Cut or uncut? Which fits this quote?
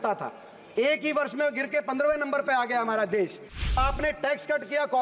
cut